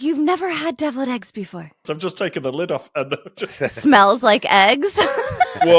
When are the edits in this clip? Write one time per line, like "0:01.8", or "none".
0:01.9